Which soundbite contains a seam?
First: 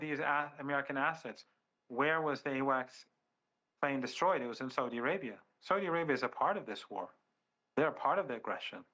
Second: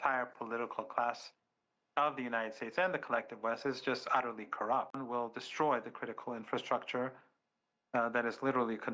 second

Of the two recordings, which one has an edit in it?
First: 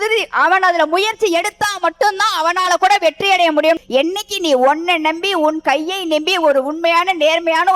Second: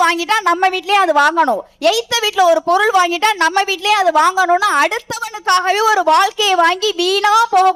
first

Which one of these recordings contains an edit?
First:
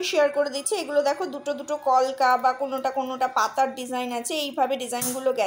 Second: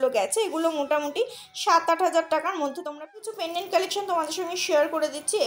second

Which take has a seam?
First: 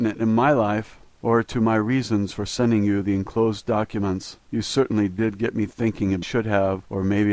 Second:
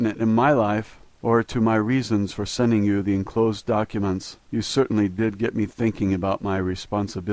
second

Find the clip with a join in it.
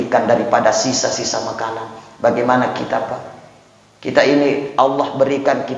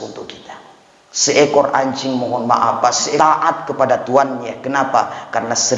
second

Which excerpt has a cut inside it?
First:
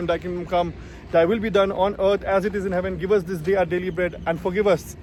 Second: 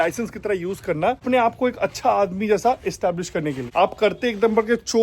second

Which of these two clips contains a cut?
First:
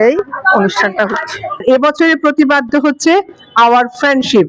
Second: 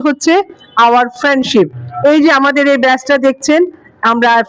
first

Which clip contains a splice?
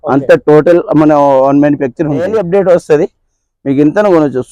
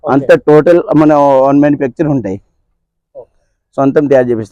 first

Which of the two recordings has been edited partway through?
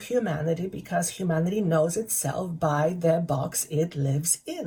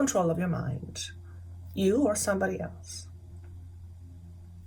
second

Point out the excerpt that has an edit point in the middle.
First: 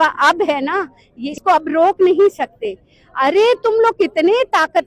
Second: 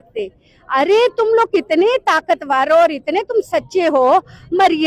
first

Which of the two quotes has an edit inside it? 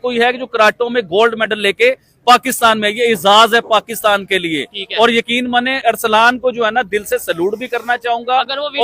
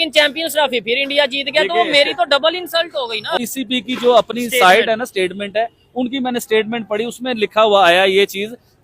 second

